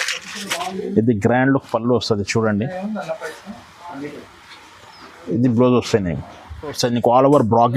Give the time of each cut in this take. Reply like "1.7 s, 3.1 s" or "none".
6.7 s